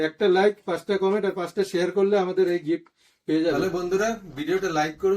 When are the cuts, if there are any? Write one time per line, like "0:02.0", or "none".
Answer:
0:03.6

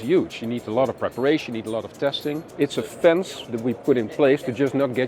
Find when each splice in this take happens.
0:02.5

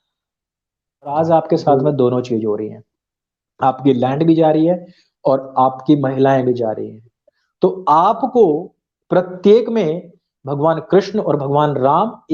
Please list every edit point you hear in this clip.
0:01.1

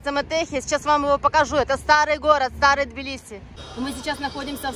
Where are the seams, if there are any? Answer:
0:03.3

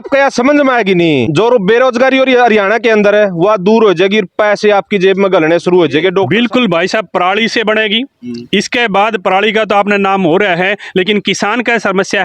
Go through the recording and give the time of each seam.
0:01.3
0:06.3

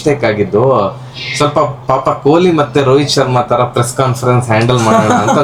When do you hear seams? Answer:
none

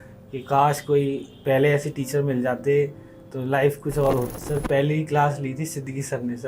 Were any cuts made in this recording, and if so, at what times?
0:04.3

